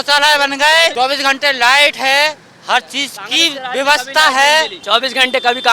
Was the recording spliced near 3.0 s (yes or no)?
no